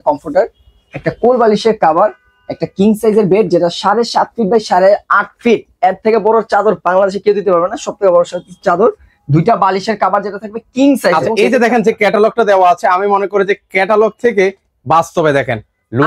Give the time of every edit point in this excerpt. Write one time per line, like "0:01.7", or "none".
0:11.3